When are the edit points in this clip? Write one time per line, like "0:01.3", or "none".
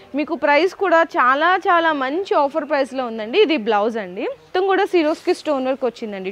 0:04.5